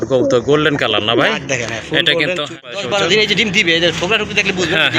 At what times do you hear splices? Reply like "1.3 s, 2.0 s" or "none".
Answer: 2.7 s